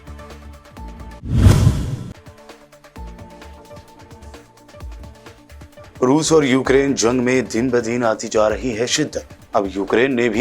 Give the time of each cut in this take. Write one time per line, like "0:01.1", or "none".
0:01.0